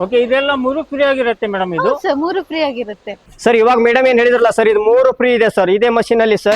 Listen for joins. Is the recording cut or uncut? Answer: uncut